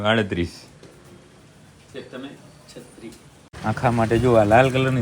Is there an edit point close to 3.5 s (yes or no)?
yes